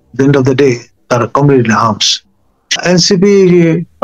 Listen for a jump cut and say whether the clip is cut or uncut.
cut